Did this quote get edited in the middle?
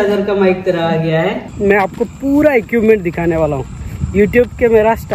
yes; 1 cut; at 1.5 s

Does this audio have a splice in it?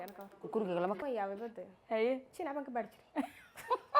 yes; 1 cut; at 1.0 s

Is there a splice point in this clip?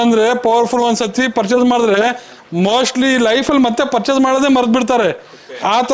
no; 0 cuts

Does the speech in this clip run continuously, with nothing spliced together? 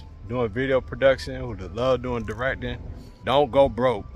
no; 1 cut; at 3.2 s

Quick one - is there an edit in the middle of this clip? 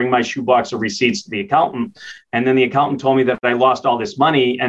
yes; 1 cut; at 3.4 s

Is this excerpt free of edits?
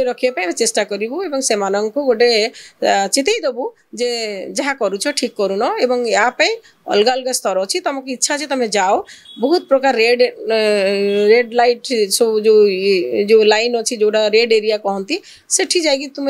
yes; 0 cuts

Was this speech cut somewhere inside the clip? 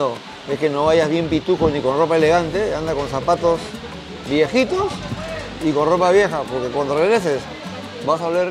no; 0 cuts

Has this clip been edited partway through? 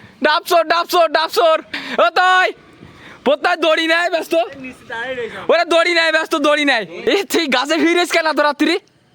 yes; 2 cuts; at 1.8 s, 6.9 s

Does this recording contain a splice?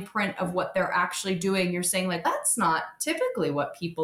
no; 0 cuts

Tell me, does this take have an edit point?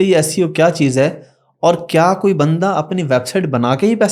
no; 0 cuts

